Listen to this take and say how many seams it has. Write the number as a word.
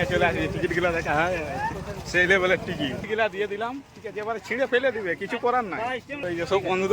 two